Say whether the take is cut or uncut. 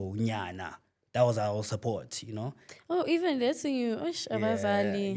uncut